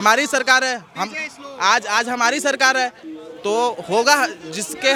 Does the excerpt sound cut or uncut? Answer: uncut